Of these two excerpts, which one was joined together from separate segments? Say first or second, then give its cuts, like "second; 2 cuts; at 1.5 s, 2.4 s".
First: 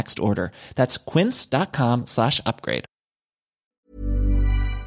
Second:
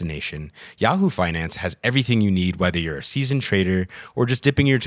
first; 1 cut; at 3.8 s